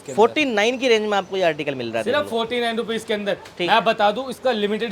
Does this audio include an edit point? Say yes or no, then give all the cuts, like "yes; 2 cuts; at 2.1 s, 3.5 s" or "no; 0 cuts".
no; 0 cuts